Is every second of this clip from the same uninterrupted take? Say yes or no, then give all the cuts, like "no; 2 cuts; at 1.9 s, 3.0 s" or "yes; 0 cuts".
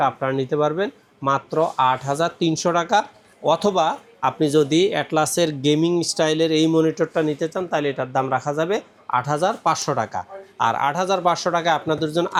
yes; 0 cuts